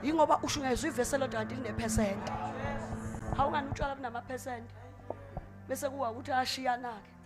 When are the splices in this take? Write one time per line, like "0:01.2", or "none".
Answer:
none